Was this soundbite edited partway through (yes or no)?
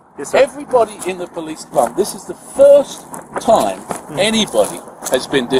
no